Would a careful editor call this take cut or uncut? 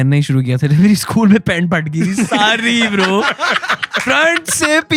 uncut